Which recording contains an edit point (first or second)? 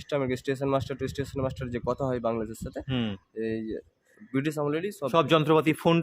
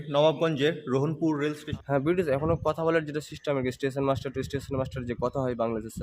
second